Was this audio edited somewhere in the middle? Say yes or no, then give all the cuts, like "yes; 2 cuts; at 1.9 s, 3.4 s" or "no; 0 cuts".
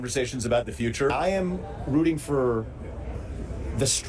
yes; 1 cut; at 1.1 s